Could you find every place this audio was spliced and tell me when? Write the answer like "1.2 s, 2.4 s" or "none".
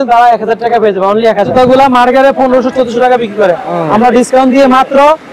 1.5 s